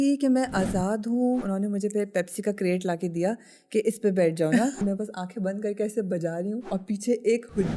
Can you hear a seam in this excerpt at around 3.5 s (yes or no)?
no